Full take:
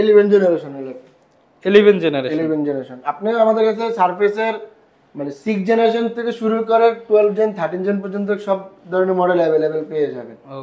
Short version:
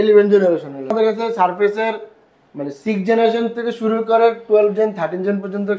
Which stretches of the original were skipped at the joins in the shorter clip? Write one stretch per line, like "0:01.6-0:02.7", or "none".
0:00.9-0:03.5

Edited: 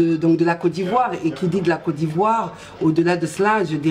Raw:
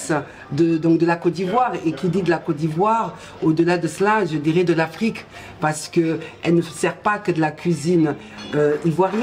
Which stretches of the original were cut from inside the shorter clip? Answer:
none

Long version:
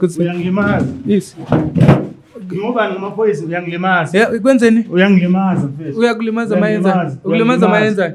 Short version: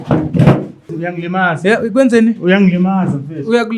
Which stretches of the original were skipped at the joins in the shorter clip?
0:02.4-0:03.4

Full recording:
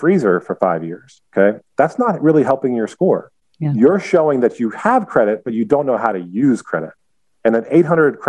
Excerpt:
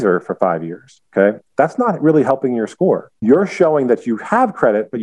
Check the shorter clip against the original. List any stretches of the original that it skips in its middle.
0:03.3-0:03.6

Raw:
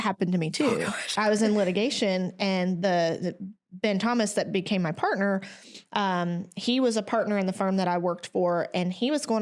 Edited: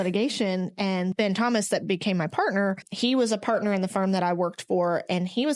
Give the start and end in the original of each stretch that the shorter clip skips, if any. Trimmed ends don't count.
0:02.7-0:03.8
0:05.5-0:06.5

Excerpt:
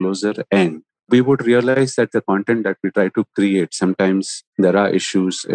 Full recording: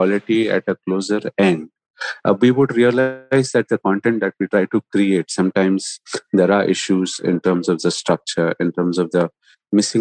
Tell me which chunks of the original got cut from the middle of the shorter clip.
0:01.9-0:02.4
0:03.0-0:03.3
0:05.9-0:06.1

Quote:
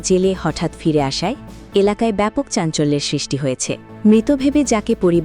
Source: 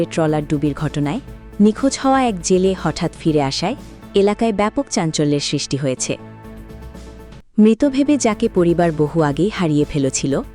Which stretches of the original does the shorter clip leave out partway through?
0:06.3-0:07.4

